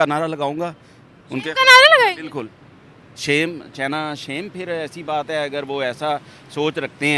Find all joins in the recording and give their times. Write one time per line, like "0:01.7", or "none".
none